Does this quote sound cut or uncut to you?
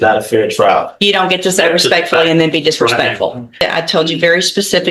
cut